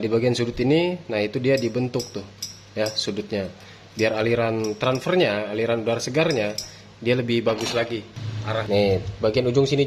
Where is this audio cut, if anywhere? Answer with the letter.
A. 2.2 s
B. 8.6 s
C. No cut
B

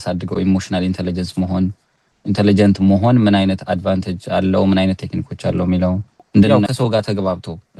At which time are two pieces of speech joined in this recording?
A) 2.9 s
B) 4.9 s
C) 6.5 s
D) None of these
C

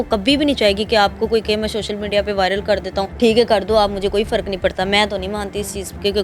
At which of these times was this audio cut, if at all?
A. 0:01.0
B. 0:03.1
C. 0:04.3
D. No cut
B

